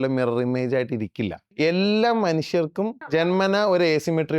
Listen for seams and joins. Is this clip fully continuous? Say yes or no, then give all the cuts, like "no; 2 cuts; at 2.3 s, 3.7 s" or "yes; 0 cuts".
no; 2 cuts; at 1.5 s, 3.1 s